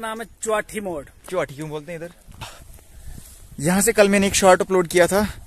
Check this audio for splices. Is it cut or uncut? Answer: cut